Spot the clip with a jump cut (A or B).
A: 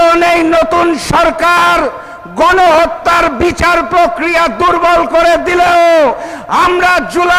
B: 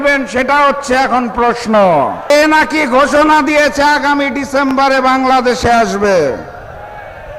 B